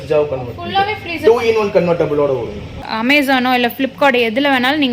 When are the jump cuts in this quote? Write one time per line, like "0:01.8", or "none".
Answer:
0:02.9